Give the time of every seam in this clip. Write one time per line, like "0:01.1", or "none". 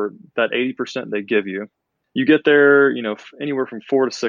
0:01.9